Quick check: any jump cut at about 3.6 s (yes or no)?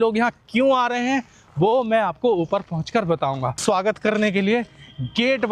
yes